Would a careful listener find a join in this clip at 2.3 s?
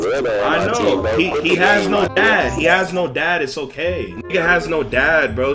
no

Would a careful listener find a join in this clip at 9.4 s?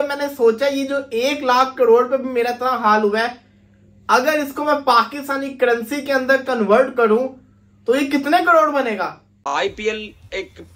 yes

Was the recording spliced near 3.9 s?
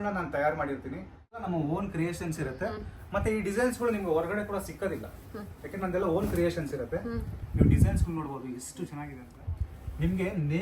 no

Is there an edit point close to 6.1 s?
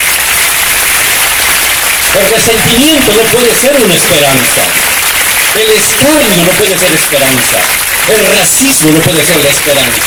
no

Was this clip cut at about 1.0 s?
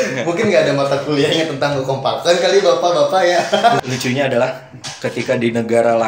no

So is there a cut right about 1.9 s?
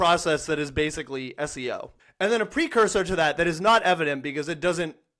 yes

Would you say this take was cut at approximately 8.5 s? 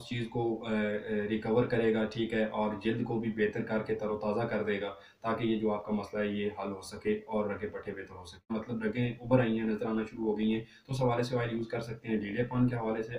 yes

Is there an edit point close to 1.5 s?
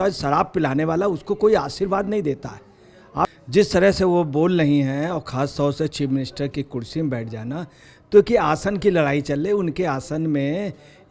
no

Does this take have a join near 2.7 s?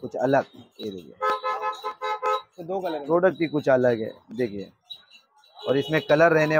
no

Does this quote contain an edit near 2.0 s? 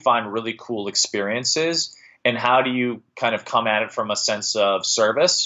no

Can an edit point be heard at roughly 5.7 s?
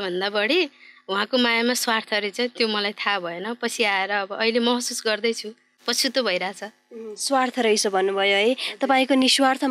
no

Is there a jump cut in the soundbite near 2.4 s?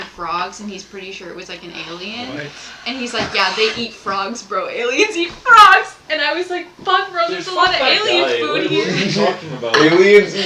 no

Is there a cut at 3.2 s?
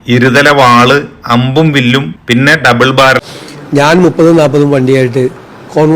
yes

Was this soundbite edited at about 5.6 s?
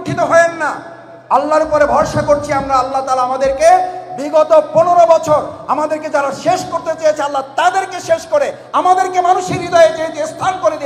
no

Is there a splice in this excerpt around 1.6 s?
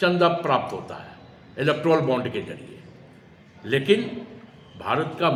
no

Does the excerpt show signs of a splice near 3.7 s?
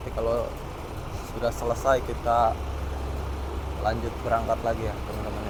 no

